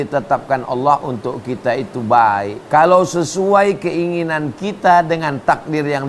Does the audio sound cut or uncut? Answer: cut